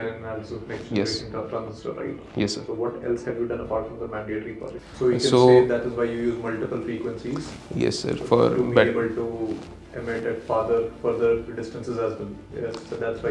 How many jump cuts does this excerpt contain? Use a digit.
1